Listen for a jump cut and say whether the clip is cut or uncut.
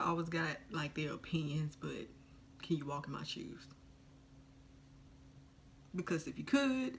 uncut